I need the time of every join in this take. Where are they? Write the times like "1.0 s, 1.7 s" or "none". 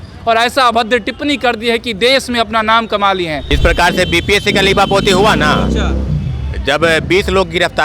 3.5 s